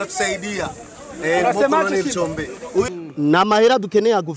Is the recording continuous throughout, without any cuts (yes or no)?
no